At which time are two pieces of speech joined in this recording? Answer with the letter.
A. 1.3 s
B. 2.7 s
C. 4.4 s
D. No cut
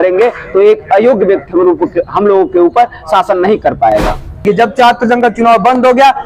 C